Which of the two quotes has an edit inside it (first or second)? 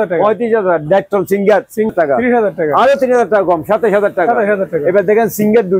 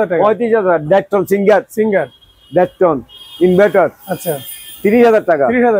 first